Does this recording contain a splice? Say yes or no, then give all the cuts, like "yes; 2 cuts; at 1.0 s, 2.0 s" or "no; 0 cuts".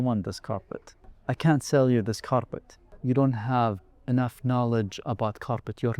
yes; 2 cuts; at 1.1 s, 2.8 s